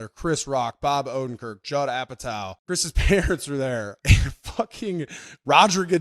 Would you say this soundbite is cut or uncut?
cut